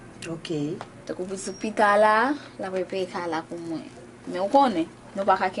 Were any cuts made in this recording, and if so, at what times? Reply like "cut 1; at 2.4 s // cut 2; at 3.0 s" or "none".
cut 1; at 1.2 s